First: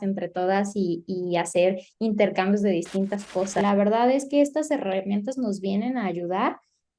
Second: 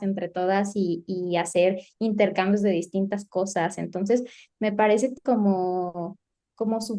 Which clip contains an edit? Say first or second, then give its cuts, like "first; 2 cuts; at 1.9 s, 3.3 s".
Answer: first; 1 cut; at 3.6 s